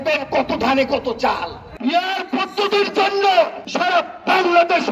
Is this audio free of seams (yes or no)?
no